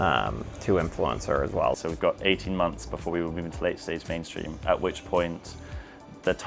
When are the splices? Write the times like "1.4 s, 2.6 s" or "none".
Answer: 1.7 s